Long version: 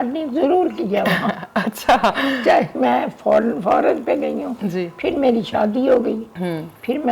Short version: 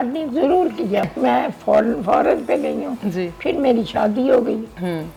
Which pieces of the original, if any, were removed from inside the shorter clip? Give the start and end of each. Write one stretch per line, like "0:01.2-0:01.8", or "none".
0:01.1-0:02.6

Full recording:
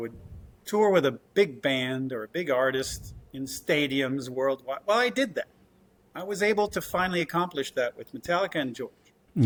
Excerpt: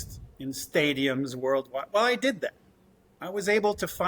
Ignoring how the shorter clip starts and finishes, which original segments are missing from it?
none

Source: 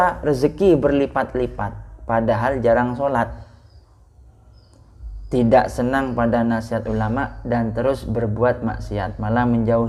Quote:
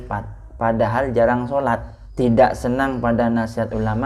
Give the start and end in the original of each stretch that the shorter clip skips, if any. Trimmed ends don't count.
0:03.5-0:05.1

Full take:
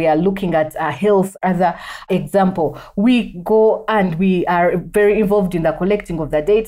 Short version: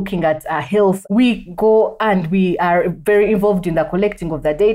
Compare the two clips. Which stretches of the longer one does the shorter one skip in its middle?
0:01.3-0:02.9

